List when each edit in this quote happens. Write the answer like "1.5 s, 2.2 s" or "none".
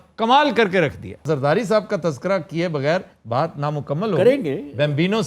1.2 s